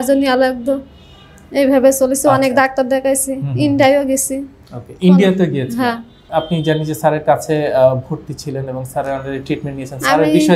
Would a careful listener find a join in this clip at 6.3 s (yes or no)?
yes